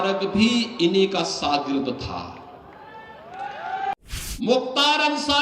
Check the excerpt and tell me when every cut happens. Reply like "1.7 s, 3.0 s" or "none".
3.9 s

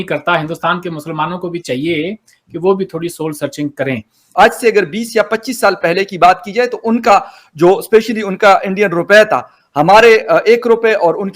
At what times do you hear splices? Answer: 4.2 s

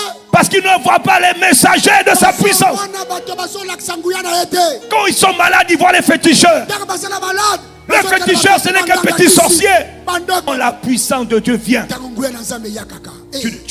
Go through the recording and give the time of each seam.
10.5 s

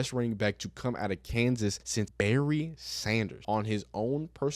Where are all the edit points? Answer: 2.0 s, 3.4 s

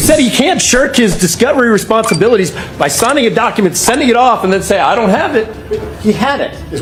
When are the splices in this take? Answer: none

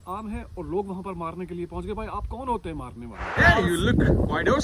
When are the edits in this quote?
3.3 s

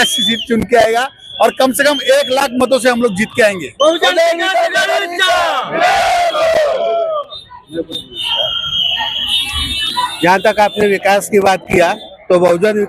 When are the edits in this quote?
none

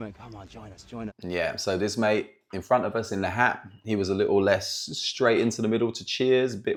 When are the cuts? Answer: none

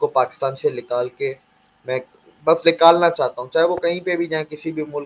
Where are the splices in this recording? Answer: none

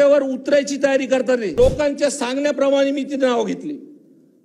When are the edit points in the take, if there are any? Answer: 1.6 s

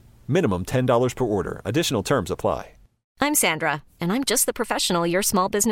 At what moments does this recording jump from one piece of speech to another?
3.1 s

